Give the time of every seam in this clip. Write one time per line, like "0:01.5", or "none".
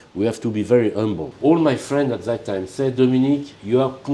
0:01.3